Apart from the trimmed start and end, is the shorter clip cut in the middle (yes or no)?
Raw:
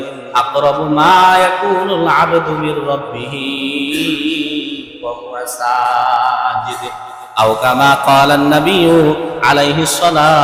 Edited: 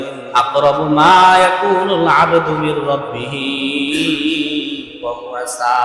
no